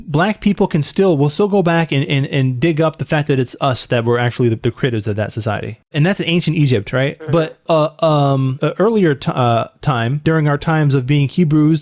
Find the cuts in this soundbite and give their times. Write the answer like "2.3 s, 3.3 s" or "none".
5.8 s, 7.6 s, 8.5 s, 10.2 s